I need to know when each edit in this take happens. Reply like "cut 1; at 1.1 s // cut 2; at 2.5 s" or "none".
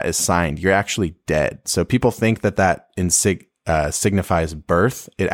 none